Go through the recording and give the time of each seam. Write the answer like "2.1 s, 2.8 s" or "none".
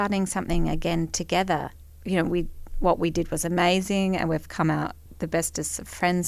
1.7 s, 5.0 s